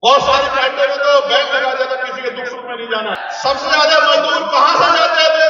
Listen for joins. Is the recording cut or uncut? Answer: cut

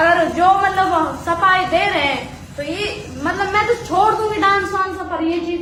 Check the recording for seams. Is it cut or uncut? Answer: uncut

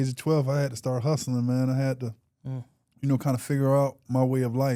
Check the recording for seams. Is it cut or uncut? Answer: uncut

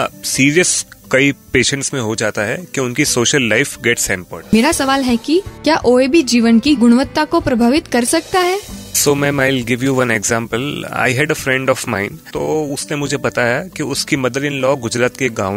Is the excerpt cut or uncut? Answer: cut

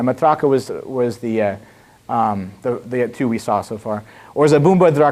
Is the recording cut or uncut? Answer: uncut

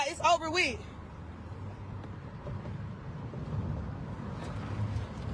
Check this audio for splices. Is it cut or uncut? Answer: uncut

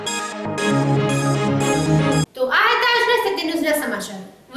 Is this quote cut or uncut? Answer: uncut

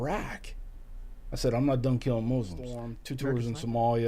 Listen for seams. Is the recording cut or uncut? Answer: cut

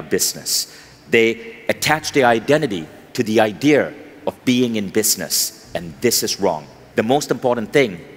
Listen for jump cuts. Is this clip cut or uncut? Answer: cut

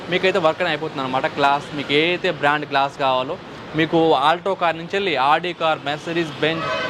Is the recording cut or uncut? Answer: uncut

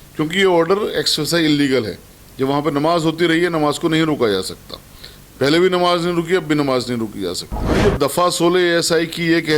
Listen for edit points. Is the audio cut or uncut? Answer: cut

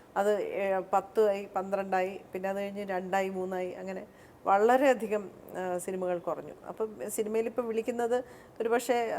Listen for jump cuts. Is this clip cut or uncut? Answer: uncut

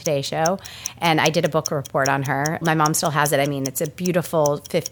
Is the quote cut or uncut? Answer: cut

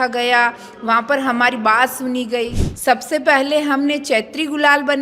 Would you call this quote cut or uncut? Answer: cut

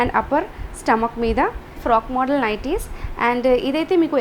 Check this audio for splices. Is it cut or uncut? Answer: cut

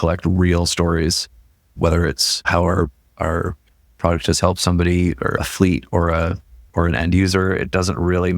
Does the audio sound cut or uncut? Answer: cut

